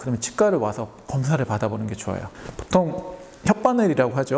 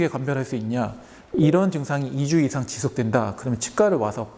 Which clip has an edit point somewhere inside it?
first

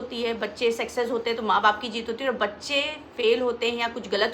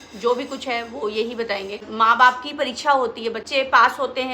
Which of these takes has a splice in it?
second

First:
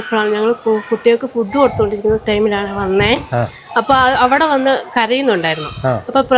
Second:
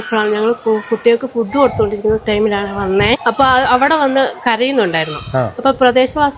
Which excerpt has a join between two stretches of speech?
second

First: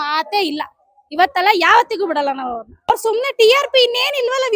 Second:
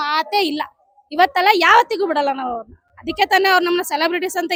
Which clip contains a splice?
first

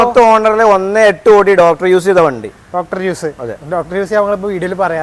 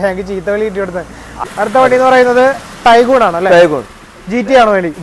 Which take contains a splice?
second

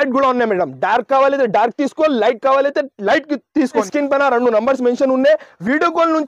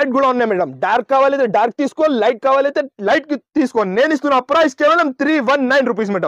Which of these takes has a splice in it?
first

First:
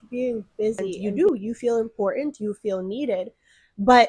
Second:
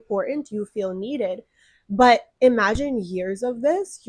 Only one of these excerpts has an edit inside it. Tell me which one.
first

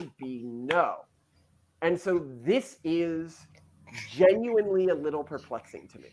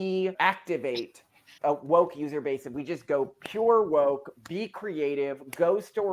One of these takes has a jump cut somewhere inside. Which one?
second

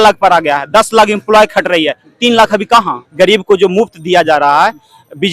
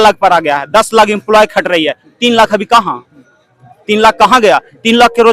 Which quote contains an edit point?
first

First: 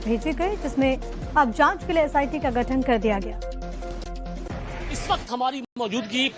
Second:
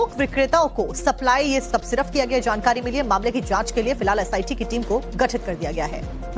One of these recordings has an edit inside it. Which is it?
second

